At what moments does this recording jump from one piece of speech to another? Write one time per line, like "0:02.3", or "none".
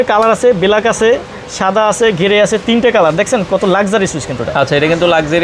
none